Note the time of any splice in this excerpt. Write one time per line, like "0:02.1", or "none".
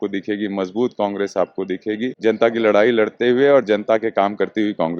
0:02.1